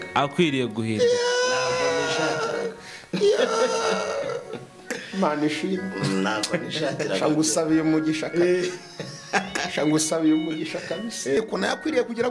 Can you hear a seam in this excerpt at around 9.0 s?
no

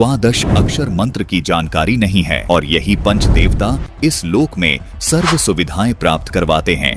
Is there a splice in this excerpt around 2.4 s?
yes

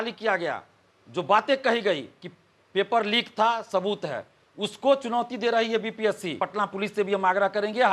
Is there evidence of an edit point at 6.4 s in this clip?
yes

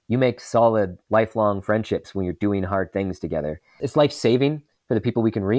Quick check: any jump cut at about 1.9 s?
no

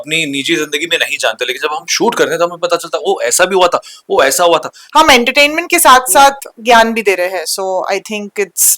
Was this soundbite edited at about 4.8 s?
yes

